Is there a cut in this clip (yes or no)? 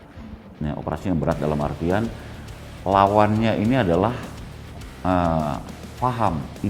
no